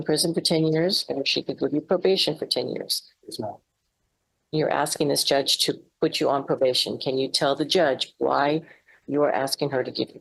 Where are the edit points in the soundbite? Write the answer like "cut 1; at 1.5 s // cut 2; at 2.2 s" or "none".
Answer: none